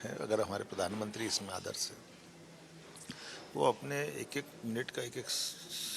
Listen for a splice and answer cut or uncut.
uncut